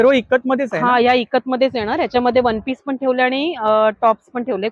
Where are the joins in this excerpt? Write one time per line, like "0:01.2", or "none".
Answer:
none